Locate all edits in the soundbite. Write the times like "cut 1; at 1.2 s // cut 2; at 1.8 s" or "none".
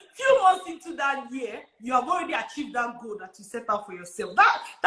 none

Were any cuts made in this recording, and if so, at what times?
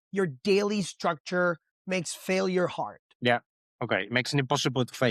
cut 1; at 3.0 s

